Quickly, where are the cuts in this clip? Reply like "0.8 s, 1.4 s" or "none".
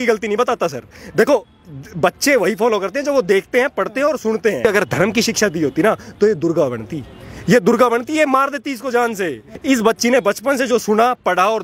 4.6 s, 9.5 s

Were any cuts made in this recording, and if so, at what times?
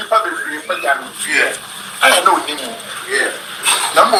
none

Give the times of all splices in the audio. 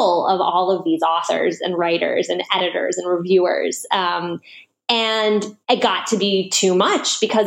5.5 s

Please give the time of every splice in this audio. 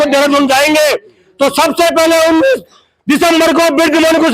none

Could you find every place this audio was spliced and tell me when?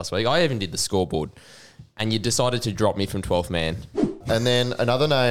4.2 s

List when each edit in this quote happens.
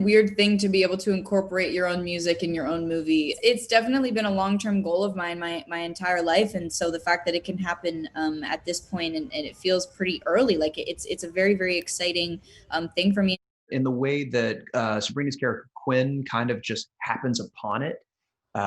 13.5 s

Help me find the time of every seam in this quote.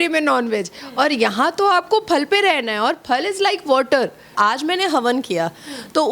4.3 s

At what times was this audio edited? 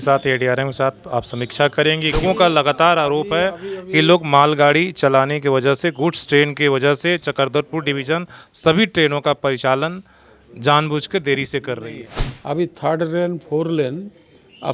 2.2 s, 12.2 s

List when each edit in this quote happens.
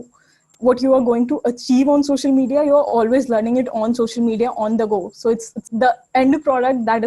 5.5 s

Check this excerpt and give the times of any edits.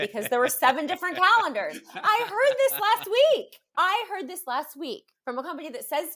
3.6 s, 5.1 s

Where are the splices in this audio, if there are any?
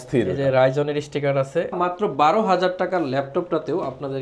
1.8 s

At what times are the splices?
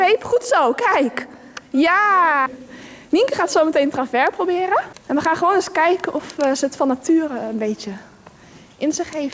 2.5 s, 5.0 s

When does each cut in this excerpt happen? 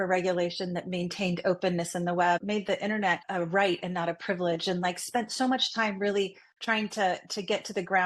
2.8 s

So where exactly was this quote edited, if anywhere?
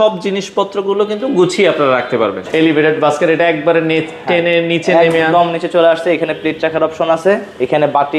2.4 s

